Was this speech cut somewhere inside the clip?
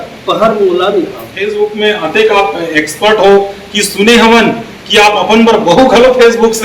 yes; 1 cut; at 1.5 s

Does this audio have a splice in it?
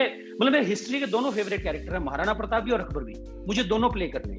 no; 0 cuts

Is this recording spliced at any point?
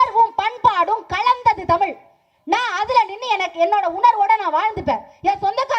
no; 0 cuts

